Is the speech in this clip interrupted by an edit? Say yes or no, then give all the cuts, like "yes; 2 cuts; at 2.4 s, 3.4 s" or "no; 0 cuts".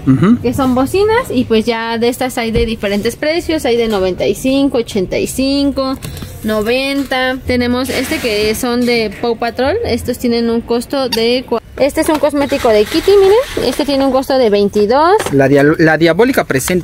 yes; 2 cuts; at 7.4 s, 11.7 s